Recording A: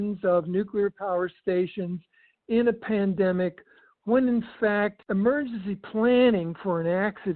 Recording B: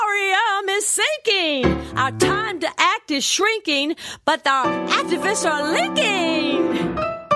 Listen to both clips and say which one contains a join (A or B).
A